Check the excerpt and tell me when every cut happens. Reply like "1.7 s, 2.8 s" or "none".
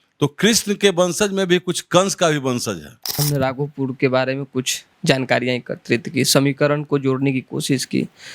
3.2 s